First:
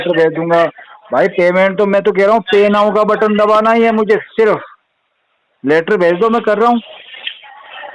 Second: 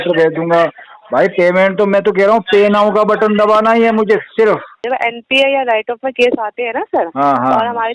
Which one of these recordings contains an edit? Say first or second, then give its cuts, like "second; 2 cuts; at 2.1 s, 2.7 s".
second; 1 cut; at 4.8 s